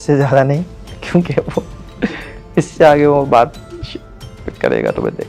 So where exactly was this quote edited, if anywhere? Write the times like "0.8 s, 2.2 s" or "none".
none